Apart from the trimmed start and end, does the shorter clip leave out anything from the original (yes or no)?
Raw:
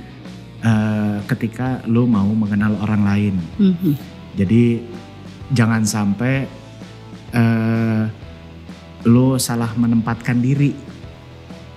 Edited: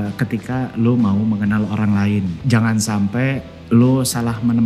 yes